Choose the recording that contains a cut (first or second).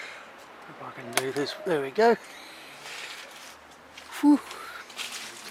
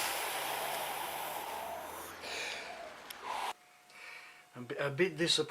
second